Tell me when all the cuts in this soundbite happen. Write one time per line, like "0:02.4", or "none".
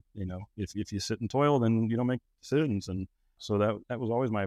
0:03.4